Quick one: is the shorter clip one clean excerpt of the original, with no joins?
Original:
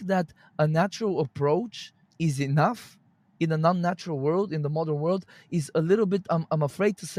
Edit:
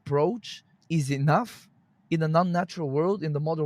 yes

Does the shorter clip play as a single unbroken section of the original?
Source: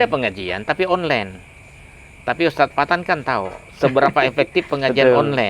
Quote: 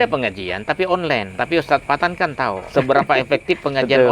no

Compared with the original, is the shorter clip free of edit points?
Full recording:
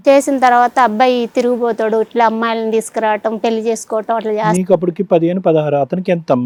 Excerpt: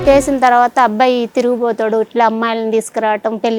yes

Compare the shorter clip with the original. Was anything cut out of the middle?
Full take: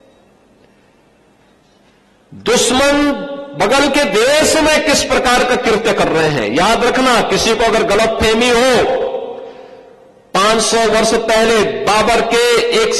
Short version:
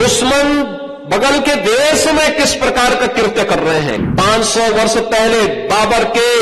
yes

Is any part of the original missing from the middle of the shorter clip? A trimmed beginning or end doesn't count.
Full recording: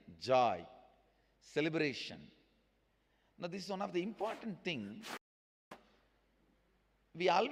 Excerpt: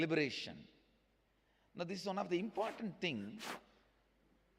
yes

